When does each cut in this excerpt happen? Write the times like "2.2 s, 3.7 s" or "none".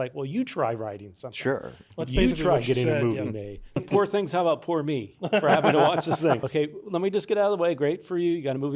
3.8 s, 6.4 s

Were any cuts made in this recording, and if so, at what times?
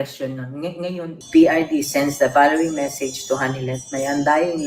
1.1 s

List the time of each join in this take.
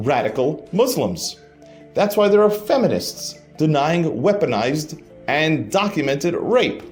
none

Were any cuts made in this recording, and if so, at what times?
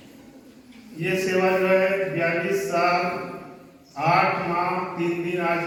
none

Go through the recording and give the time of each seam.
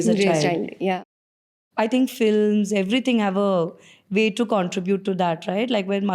1.1 s

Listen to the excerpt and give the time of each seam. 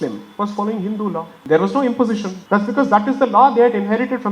1.3 s, 2.3 s

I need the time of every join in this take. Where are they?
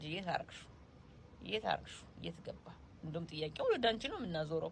none

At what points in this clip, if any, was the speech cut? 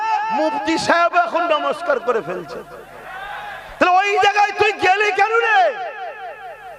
none

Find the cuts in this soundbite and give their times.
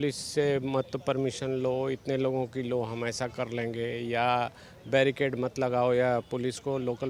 none

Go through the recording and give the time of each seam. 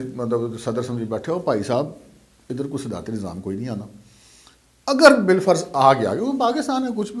none

